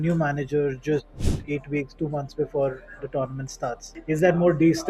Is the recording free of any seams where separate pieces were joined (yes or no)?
no